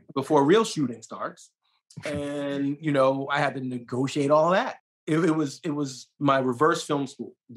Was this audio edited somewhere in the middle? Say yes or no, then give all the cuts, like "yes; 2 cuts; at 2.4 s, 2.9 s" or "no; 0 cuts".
yes; 1 cut; at 4.8 s